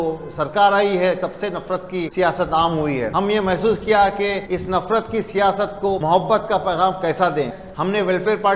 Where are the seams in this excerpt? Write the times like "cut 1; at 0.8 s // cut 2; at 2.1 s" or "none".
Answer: cut 1; at 2.1 s // cut 2; at 3.1 s // cut 3; at 4.4 s // cut 4; at 6.0 s // cut 5; at 7.6 s